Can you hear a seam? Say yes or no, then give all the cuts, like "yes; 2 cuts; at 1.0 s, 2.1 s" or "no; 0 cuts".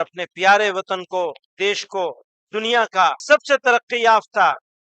yes; 1 cut; at 3.2 s